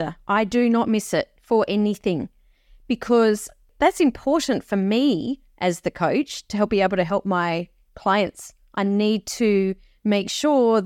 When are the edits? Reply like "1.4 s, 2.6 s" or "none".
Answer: none

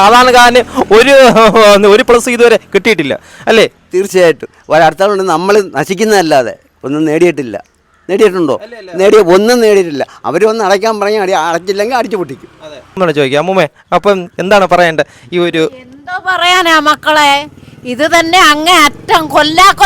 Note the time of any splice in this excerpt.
13.0 s

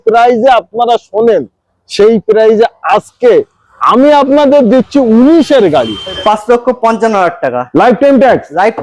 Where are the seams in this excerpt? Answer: 6.2 s

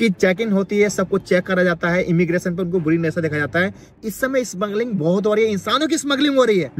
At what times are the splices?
3.9 s

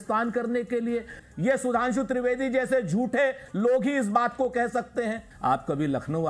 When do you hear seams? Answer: 1.2 s, 5.3 s

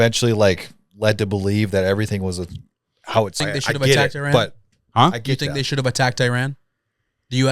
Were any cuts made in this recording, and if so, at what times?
3.4 s

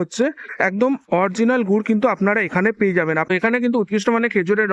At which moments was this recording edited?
3.3 s

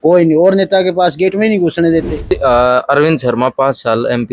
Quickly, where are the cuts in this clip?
2.2 s

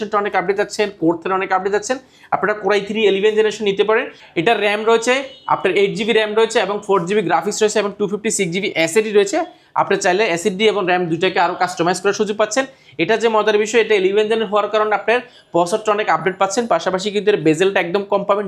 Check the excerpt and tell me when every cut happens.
none

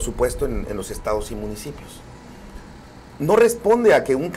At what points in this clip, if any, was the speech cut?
none

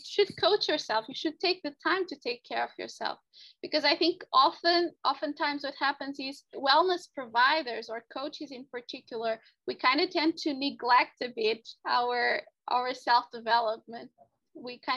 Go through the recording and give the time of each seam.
5.0 s, 6.5 s

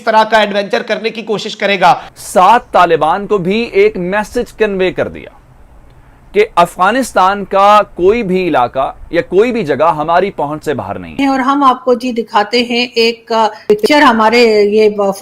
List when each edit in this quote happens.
1.9 s, 11.2 s, 13.6 s

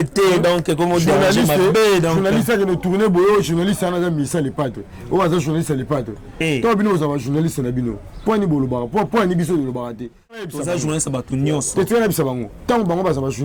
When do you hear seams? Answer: 10.5 s

